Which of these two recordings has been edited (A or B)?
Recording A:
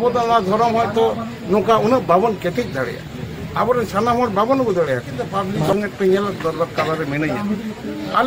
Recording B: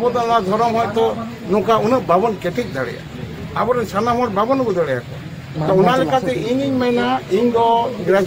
A